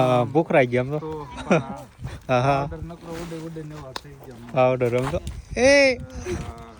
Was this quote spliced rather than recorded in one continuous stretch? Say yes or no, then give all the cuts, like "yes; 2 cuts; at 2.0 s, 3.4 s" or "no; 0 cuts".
no; 0 cuts